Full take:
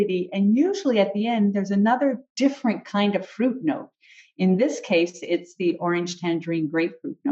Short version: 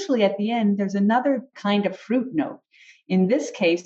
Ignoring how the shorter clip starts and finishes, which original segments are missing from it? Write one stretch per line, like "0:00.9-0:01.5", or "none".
0:02.3-0:02.8